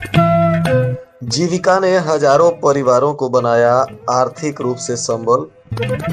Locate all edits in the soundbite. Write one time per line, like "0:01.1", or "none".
0:00.9